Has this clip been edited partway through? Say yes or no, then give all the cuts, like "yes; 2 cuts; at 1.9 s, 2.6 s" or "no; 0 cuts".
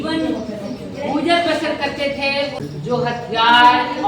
yes; 1 cut; at 2.6 s